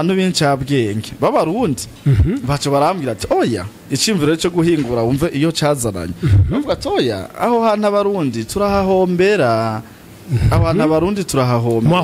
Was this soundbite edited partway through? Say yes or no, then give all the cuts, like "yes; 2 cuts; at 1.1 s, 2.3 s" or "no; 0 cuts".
no; 0 cuts